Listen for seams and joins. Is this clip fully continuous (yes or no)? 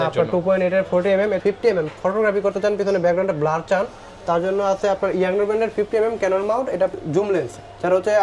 no